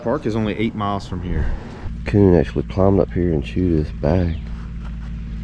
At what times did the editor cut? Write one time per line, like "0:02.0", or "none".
0:01.7